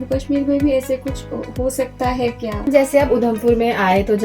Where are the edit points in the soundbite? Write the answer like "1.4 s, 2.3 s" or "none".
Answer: 2.7 s